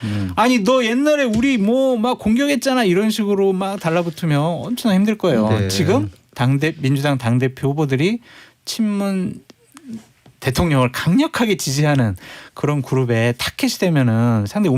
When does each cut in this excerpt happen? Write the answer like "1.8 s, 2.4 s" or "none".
none